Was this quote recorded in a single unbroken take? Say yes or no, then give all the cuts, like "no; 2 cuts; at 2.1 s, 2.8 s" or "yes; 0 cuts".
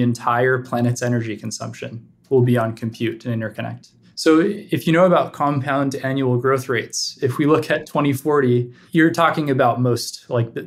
yes; 0 cuts